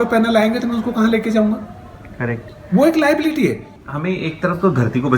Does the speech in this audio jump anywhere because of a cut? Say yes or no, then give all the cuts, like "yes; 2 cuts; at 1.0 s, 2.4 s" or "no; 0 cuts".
yes; 1 cut; at 3.8 s